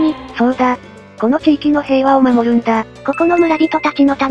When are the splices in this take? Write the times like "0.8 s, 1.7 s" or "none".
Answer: 2.9 s